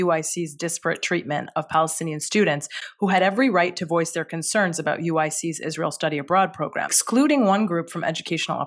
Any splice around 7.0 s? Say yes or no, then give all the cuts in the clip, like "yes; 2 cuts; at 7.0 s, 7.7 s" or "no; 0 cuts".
yes; 1 cut; at 7.0 s